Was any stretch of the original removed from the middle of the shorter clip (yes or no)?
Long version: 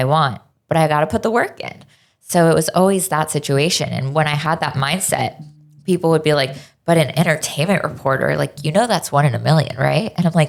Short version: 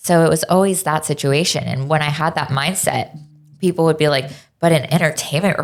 no